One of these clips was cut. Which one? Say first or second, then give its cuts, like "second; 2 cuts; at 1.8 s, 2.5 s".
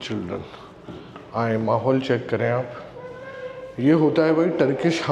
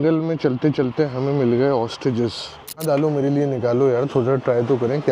second; 1 cut; at 2.8 s